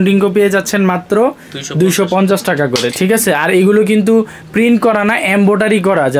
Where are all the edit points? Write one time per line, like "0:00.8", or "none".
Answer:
none